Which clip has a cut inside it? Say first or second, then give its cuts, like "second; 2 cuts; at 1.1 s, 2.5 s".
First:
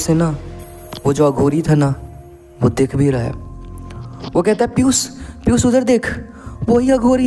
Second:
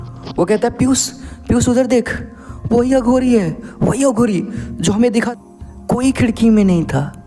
second; 1 cut; at 5.3 s